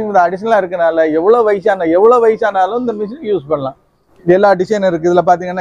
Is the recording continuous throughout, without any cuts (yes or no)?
no